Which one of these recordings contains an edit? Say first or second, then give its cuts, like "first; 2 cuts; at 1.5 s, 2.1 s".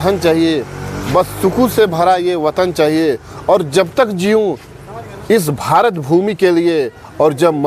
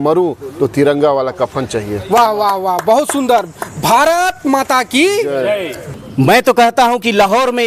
second; 1 cut; at 5.8 s